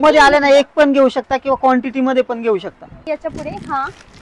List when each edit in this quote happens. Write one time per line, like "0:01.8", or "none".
0:02.9